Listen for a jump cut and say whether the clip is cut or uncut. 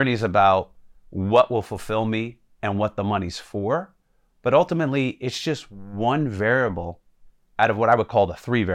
uncut